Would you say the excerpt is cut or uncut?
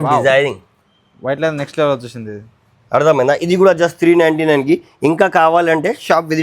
uncut